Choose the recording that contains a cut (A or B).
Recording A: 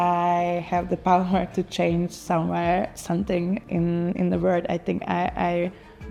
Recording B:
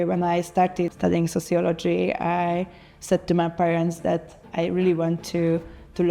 B